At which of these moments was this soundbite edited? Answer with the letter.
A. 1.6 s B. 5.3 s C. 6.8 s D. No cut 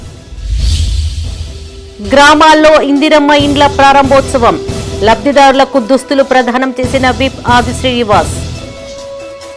A